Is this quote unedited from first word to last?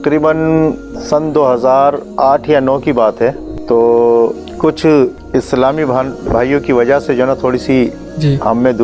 no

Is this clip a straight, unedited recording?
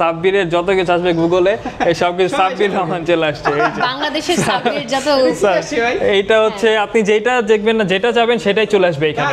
yes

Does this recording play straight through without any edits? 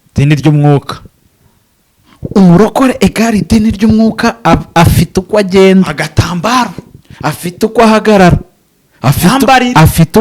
yes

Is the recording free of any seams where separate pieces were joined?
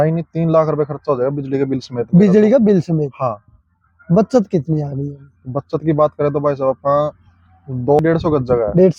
no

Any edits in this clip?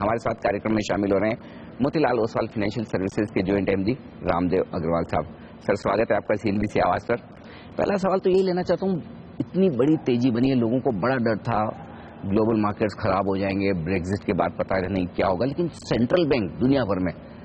no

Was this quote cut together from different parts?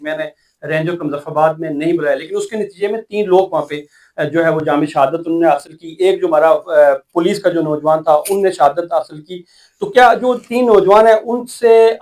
no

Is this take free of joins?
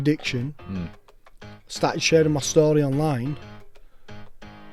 yes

